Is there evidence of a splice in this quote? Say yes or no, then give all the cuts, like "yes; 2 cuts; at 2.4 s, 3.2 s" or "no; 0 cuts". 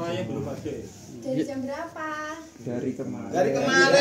no; 0 cuts